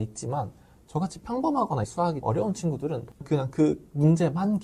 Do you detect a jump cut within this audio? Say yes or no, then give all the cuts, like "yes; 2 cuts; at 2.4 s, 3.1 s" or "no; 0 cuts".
yes; 1 cut; at 3.1 s